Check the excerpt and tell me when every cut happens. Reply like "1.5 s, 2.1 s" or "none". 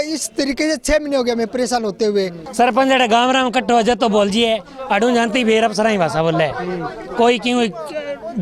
2.4 s